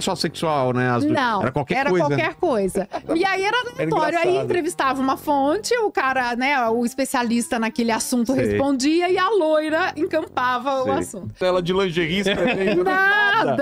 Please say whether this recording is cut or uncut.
cut